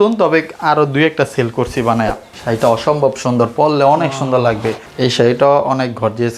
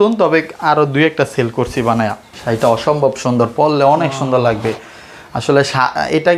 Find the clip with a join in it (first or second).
first